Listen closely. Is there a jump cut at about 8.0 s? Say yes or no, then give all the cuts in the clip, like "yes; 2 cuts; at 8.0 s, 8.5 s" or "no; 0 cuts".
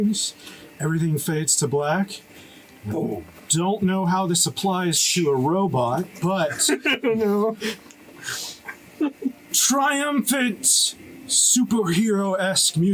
no; 0 cuts